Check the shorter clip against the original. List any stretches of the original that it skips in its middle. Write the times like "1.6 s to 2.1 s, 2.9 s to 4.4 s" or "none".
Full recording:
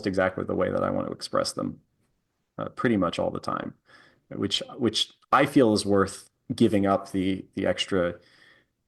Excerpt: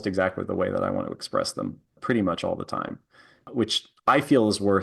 1.9 s to 2.6 s, 4.1 s to 4.6 s